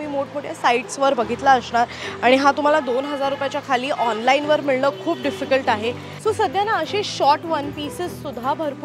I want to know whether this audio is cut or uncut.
cut